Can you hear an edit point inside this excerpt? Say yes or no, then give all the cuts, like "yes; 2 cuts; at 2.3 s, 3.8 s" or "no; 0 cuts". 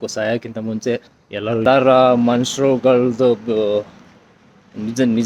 yes; 1 cut; at 1.7 s